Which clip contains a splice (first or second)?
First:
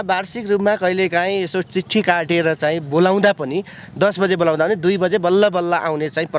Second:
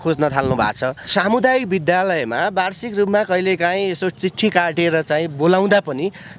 second